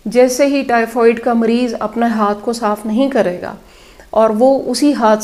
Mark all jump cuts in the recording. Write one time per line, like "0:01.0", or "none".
none